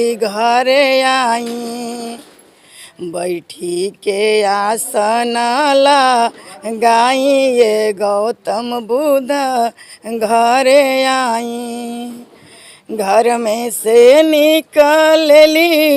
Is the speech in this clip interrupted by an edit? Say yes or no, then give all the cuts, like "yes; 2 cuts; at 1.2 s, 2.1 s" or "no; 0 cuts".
no; 0 cuts